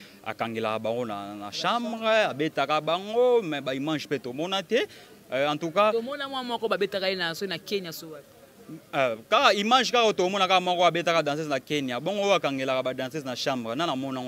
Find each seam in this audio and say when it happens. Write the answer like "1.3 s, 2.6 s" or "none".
none